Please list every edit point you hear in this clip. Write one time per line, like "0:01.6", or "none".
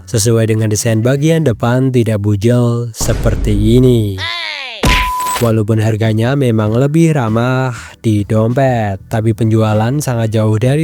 0:05.2